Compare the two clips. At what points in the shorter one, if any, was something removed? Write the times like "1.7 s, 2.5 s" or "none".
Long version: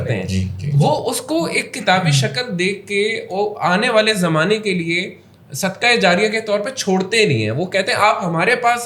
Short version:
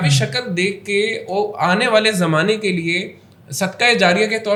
none